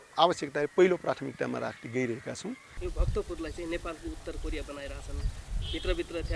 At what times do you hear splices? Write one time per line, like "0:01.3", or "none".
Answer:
0:02.7